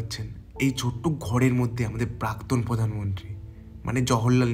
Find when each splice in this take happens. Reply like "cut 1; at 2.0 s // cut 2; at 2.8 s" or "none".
none